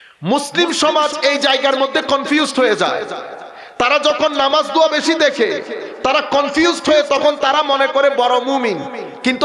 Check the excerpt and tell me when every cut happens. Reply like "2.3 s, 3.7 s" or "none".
none